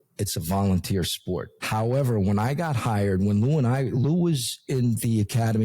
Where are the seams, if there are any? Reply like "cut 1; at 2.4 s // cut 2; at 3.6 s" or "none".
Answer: cut 1; at 1.6 s